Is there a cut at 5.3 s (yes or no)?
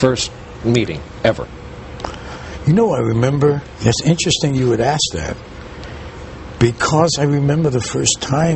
no